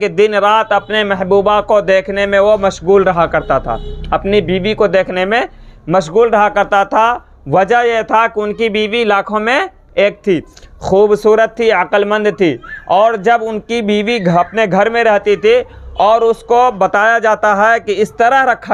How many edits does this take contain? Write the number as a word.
zero